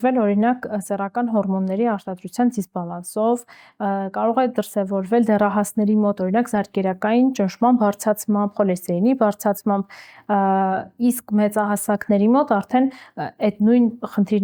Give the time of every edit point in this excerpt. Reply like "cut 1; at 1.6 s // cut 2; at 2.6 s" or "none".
none